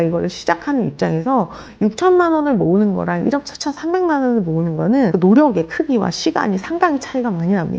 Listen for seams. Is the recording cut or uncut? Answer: cut